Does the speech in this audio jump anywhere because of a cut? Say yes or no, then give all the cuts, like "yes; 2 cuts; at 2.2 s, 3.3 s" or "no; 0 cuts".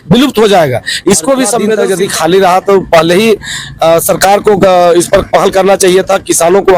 yes; 1 cut; at 1.8 s